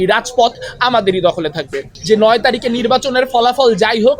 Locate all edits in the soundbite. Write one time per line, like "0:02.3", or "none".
0:01.9